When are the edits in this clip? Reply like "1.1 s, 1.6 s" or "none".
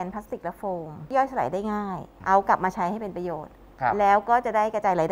1.1 s, 2.1 s